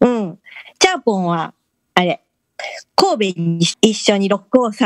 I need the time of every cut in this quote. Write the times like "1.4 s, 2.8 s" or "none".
3.7 s